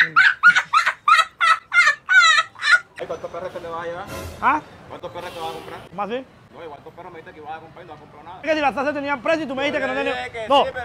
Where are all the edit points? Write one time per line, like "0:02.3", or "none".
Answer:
0:02.9
0:05.8
0:06.4
0:08.5